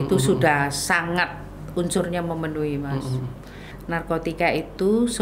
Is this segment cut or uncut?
cut